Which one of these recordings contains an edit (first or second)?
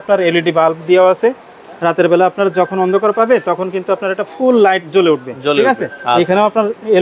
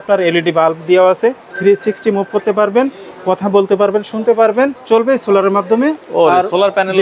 second